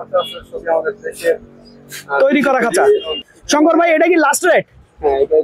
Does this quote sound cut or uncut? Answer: uncut